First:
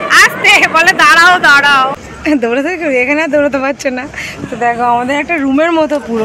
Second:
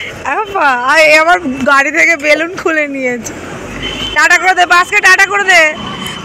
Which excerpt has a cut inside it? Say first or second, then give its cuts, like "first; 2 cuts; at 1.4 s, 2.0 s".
first; 1 cut; at 2.0 s